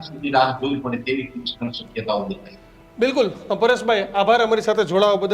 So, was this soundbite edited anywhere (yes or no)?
no